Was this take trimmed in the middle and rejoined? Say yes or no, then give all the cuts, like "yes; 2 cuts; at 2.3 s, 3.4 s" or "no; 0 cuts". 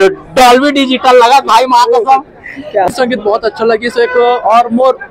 yes; 1 cut; at 2.9 s